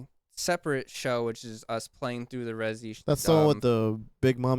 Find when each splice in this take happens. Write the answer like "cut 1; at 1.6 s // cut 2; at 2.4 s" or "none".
cut 1; at 2.9 s